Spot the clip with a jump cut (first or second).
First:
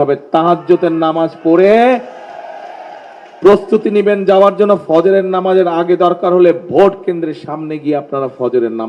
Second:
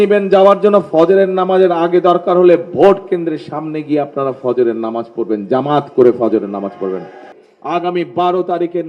second